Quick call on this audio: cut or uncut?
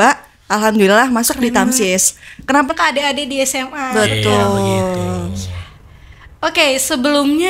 cut